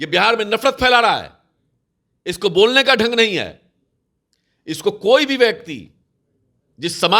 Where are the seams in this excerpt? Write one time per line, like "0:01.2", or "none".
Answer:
none